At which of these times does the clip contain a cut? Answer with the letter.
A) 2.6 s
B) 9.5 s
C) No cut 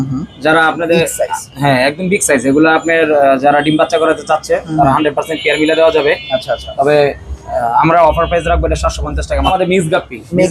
B